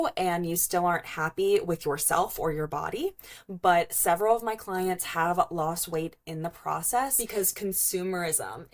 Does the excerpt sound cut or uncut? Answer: cut